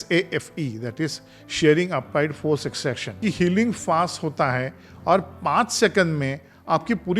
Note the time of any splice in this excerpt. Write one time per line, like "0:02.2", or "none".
0:03.1